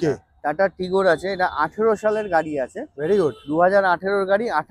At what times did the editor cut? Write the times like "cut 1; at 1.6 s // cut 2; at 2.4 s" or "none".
none